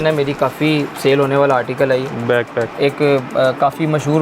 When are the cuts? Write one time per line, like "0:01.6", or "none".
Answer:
0:02.7